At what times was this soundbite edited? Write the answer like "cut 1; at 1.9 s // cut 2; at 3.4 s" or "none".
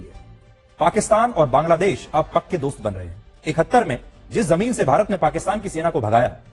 none